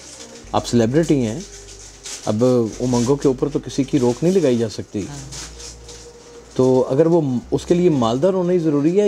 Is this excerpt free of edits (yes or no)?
yes